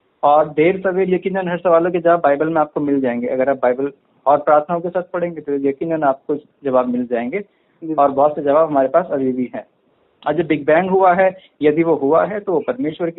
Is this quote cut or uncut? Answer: uncut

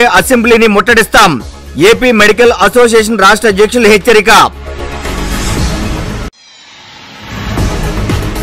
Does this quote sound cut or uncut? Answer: uncut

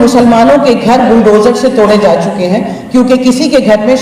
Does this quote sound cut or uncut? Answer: uncut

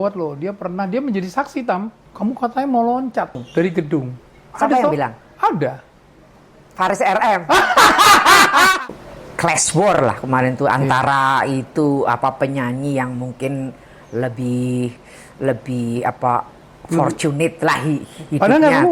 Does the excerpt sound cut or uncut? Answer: cut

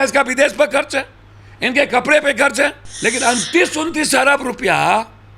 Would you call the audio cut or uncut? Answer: cut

